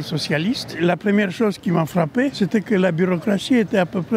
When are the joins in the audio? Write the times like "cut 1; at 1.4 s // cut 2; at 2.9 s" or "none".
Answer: cut 1; at 0.8 s // cut 2; at 2.3 s